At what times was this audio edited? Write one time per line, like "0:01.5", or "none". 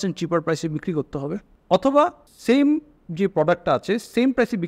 0:01.5
0:02.3